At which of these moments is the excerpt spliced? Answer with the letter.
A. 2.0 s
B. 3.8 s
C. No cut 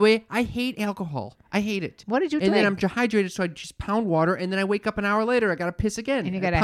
A